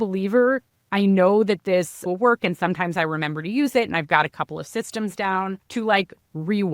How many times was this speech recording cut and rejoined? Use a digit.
1